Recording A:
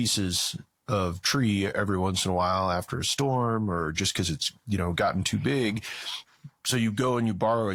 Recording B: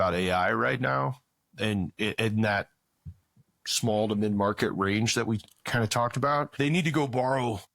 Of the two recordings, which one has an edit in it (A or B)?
B